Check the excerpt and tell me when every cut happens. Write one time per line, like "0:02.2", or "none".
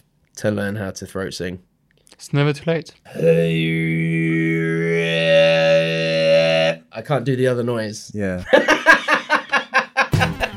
0:03.0